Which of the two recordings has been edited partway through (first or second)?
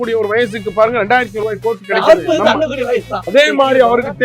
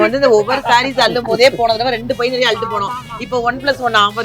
first